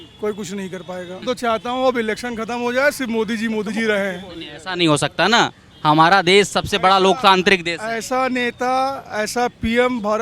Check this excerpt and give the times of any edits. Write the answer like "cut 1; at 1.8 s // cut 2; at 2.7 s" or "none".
cut 1; at 1.2 s